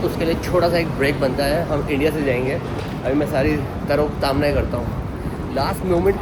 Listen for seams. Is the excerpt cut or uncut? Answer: uncut